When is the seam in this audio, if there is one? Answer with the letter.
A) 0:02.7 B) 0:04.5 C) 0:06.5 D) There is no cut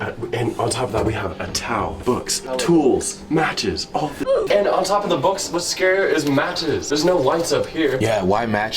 B